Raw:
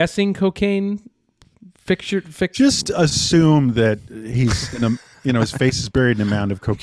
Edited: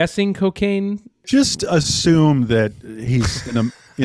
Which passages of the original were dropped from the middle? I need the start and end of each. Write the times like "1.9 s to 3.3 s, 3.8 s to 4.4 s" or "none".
1.2 s to 2.5 s